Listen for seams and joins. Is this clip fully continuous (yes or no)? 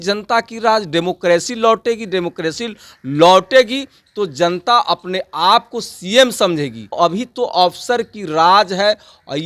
no